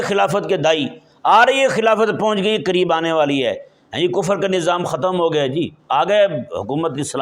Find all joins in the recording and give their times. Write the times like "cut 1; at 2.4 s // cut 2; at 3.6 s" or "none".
none